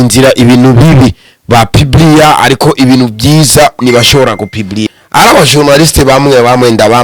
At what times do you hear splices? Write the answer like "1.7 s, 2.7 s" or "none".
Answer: 4.9 s